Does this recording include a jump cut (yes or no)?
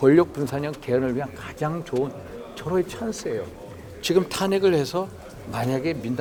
no